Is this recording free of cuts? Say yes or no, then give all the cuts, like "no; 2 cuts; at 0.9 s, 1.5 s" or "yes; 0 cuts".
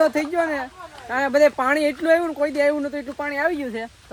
yes; 0 cuts